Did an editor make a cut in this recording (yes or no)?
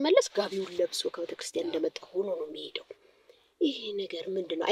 no